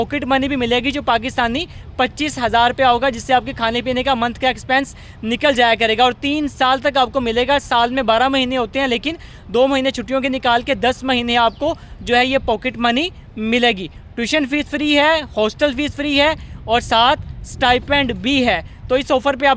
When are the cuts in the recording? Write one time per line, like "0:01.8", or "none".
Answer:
none